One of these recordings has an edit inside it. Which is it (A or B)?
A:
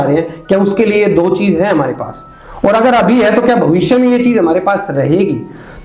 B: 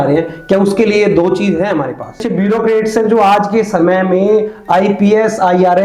B